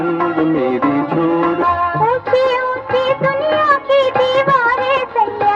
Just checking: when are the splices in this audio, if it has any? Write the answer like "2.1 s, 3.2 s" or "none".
1.6 s